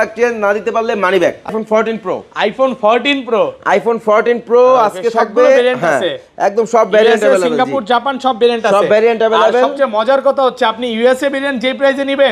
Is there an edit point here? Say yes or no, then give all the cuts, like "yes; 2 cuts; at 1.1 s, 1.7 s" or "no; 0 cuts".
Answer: yes; 1 cut; at 1.5 s